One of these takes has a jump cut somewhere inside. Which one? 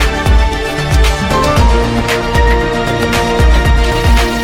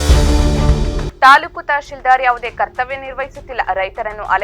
second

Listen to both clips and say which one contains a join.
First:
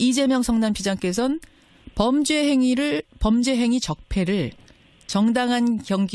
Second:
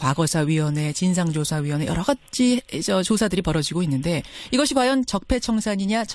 second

